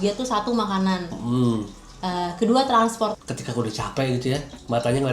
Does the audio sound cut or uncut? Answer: cut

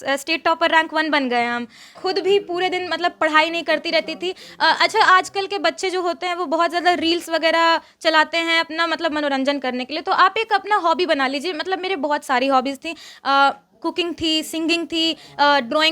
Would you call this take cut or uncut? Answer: cut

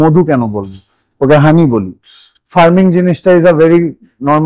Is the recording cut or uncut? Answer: cut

